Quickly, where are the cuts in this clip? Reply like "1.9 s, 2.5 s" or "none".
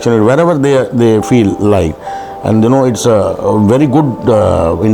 none